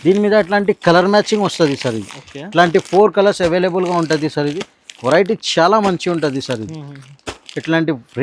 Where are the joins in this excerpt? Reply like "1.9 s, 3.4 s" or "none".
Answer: none